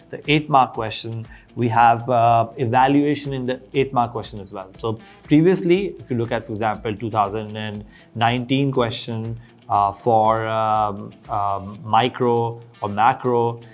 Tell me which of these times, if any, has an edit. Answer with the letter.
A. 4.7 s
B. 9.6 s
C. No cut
C